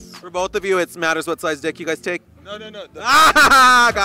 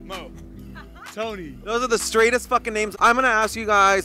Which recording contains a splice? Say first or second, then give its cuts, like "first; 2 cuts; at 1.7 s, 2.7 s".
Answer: second; 1 cut; at 2.9 s